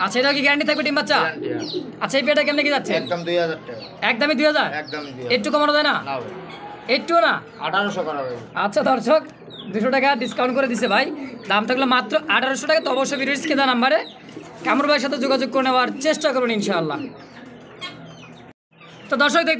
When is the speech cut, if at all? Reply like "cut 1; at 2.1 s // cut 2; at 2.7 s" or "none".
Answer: none